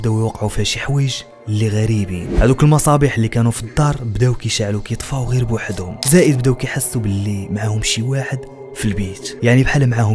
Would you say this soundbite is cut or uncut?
uncut